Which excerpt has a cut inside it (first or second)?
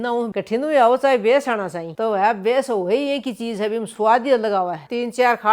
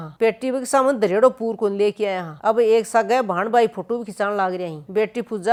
first